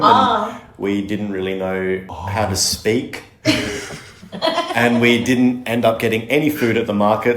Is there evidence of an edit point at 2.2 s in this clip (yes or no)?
yes